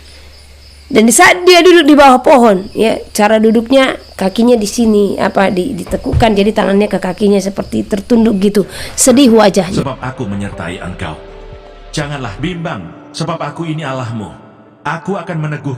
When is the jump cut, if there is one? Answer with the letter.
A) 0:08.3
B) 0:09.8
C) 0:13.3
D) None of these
B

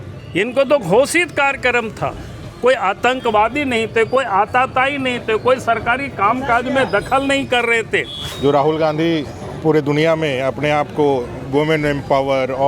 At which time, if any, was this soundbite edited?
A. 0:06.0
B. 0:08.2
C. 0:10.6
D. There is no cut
B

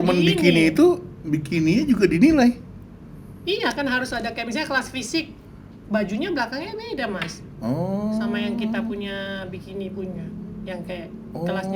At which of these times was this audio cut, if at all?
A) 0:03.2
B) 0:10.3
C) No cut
C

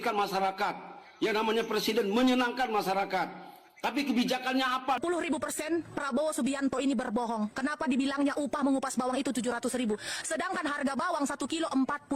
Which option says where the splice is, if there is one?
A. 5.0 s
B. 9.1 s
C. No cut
A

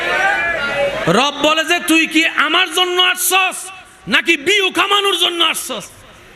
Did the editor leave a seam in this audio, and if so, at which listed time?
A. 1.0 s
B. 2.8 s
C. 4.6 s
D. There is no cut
A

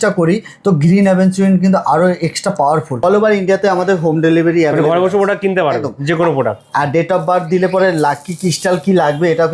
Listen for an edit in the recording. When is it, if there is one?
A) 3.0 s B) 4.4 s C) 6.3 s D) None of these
A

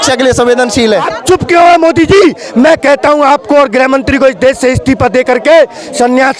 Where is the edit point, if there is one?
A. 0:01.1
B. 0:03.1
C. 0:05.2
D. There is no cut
A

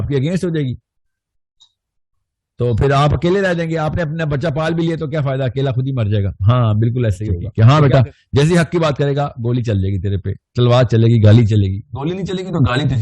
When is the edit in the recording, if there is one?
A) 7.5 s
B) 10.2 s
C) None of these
A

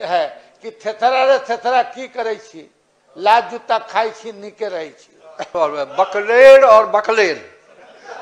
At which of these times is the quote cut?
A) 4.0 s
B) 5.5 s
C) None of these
B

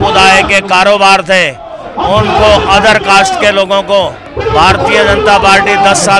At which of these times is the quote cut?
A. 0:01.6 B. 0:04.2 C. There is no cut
B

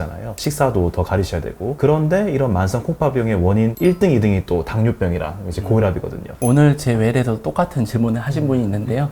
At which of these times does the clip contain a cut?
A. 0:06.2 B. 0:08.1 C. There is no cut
A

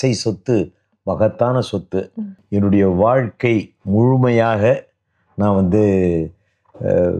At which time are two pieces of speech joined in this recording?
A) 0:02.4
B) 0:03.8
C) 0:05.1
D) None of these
A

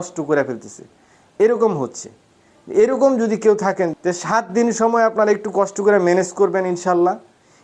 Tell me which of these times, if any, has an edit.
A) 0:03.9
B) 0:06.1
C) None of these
A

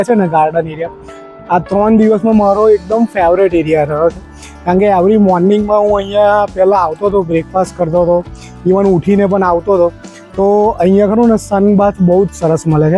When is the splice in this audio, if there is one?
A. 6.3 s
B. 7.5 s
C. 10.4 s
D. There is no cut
D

